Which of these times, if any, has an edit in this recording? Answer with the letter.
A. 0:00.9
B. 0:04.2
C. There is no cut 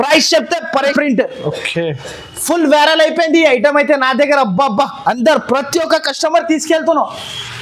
A